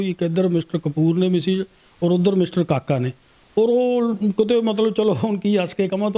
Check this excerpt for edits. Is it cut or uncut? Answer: uncut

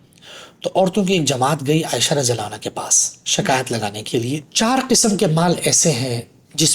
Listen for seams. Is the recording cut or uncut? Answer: cut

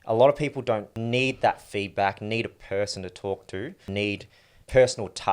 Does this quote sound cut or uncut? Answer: cut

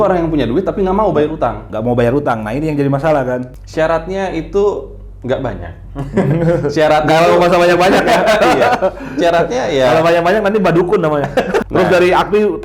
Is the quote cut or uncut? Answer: cut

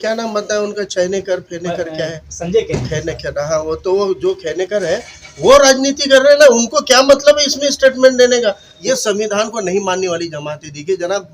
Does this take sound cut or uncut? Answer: cut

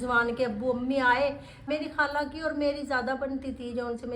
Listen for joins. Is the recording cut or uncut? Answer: cut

